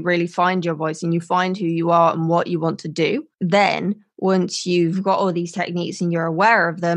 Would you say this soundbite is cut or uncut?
cut